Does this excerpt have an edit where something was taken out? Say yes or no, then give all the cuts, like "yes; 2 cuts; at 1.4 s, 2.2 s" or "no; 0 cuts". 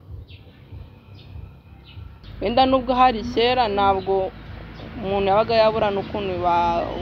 yes; 1 cut; at 2.2 s